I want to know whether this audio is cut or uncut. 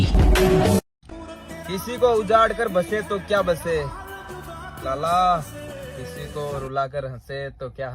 cut